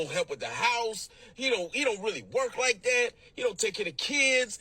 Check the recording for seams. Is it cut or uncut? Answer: cut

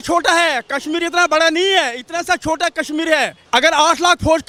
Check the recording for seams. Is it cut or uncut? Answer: uncut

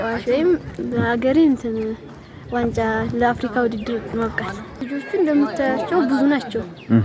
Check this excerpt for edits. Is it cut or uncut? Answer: cut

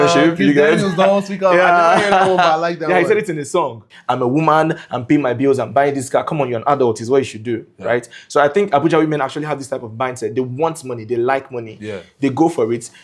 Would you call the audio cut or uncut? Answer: cut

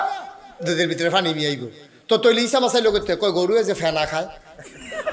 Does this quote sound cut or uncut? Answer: uncut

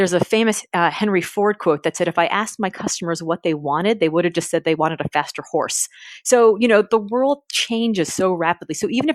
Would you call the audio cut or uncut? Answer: uncut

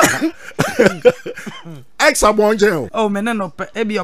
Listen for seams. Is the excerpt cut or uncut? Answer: cut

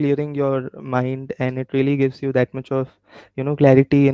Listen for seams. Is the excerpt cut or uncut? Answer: uncut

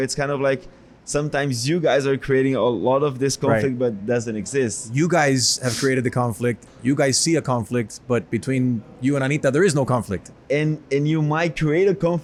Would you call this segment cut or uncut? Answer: uncut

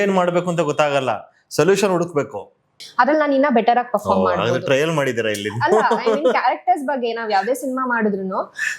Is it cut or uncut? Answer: cut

